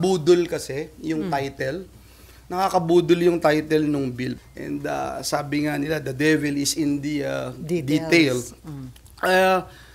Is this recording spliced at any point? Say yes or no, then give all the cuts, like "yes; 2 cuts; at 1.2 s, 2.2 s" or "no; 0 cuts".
yes; 1 cut; at 4.3 s